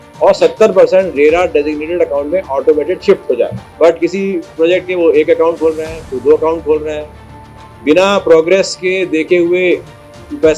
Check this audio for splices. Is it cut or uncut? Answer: cut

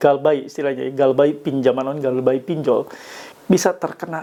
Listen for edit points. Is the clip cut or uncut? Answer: uncut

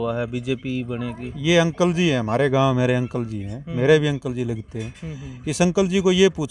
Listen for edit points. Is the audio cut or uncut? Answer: uncut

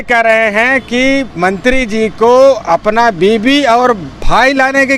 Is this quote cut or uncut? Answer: uncut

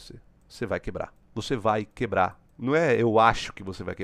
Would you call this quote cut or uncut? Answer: cut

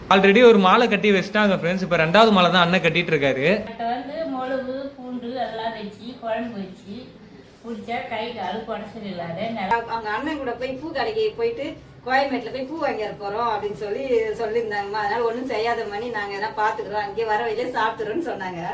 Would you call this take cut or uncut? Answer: cut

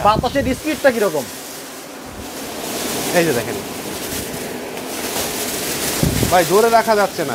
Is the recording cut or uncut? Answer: uncut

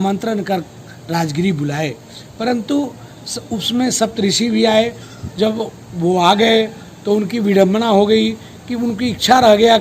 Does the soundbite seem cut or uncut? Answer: uncut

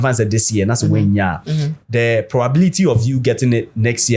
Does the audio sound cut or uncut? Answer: uncut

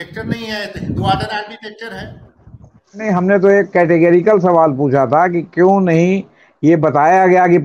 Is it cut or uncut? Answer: cut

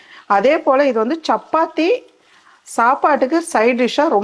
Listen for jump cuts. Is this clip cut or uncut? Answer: uncut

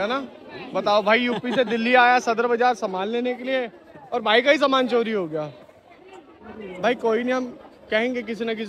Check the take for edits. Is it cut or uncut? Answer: uncut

